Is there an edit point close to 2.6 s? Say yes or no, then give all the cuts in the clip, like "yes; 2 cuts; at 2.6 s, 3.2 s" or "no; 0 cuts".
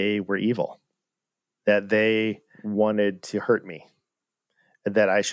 yes; 1 cut; at 2.6 s